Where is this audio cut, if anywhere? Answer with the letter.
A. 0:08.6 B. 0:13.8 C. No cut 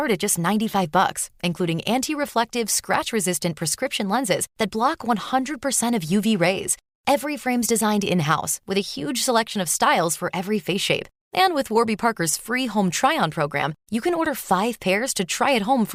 C